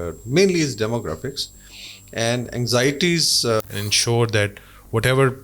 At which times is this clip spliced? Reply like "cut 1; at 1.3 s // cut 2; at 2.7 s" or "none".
cut 1; at 3.6 s